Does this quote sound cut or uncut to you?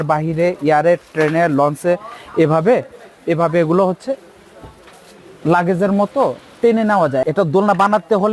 cut